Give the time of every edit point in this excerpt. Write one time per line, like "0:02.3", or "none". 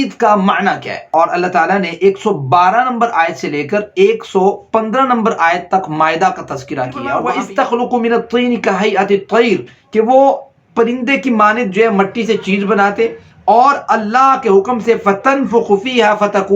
0:01.1
0:07.3